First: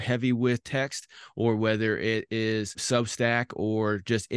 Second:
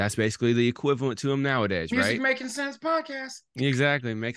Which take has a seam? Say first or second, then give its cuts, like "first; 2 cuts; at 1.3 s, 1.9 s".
first; 1 cut; at 2.8 s